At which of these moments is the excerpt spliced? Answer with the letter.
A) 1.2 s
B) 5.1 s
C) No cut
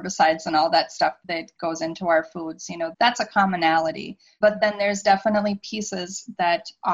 A